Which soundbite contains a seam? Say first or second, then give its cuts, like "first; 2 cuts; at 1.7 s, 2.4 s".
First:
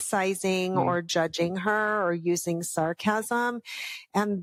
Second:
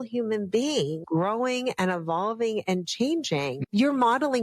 second; 2 cuts; at 1.0 s, 3.7 s